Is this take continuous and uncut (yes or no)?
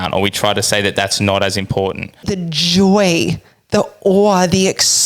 no